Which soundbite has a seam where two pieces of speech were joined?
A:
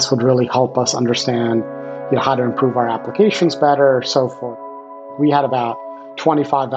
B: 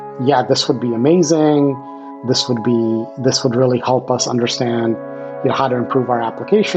A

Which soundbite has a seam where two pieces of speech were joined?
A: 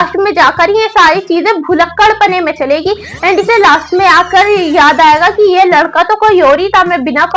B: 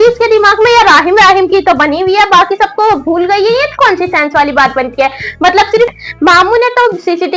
B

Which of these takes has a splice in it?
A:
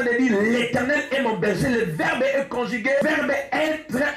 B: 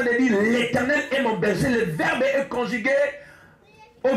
A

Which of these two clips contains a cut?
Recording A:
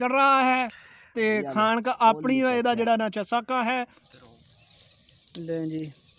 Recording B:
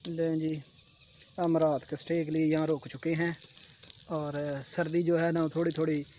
A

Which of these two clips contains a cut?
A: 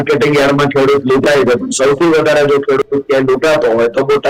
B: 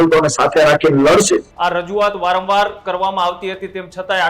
B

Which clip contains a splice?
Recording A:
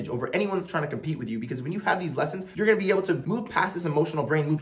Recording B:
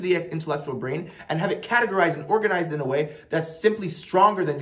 A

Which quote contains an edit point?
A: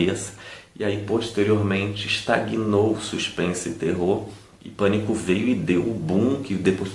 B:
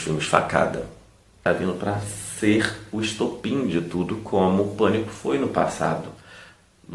B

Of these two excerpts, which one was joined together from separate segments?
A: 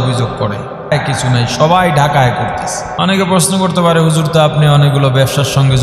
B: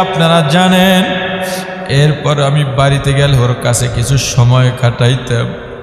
A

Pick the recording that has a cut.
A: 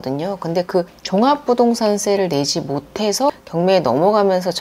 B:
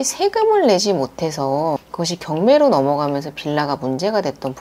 A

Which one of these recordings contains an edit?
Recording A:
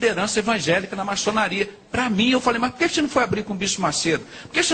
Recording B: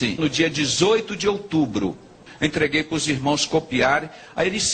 B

